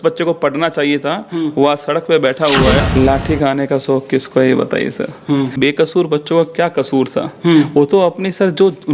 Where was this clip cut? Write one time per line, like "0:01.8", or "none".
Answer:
0:02.8
0:05.6